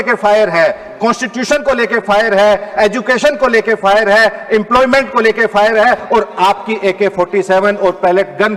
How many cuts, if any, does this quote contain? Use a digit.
0